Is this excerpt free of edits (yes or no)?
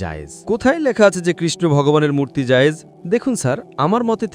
no